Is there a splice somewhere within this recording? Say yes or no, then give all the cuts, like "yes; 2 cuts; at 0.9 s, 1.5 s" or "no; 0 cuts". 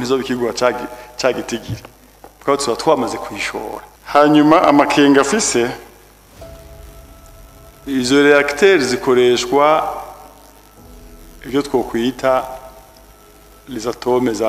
yes; 1 cut; at 3.9 s